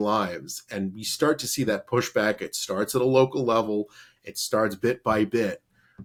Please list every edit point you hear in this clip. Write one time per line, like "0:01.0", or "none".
none